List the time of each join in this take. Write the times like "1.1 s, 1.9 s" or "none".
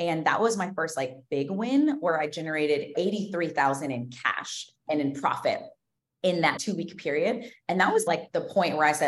2.9 s, 4.8 s, 6.6 s, 8.1 s